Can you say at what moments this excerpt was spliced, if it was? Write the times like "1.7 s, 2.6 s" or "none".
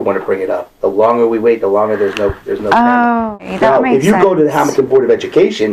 3.3 s